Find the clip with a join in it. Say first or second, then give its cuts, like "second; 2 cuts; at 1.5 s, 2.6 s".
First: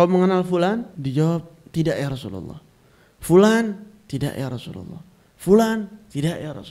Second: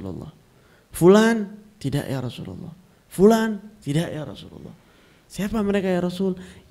first; 1 cut; at 0.9 s